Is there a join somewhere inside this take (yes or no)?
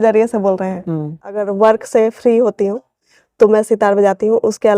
yes